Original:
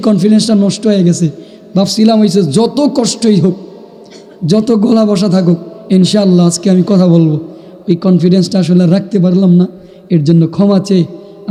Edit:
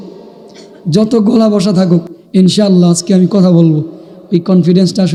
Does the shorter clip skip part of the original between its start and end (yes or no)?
no